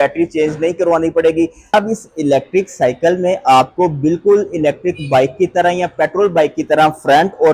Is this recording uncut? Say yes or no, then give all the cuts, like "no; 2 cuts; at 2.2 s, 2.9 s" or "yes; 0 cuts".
no; 1 cut; at 1.6 s